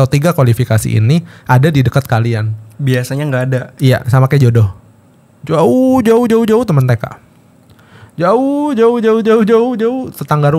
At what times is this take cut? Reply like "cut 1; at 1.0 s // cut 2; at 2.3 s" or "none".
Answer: none